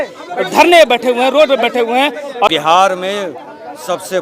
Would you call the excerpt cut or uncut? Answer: cut